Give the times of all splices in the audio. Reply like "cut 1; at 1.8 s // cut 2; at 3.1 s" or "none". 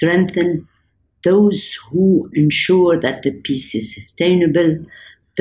none